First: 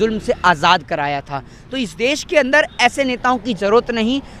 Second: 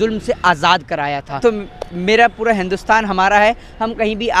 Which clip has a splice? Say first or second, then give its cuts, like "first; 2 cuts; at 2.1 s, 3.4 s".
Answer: second; 1 cut; at 1.4 s